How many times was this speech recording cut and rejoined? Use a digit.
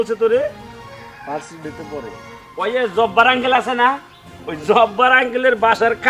0